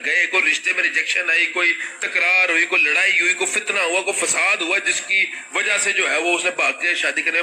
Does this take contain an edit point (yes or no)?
no